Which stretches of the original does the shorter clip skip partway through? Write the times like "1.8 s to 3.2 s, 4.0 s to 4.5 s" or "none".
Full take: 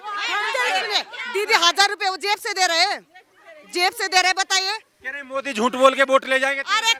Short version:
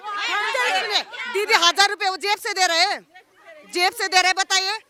none